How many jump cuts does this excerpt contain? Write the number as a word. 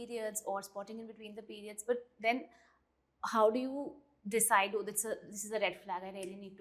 zero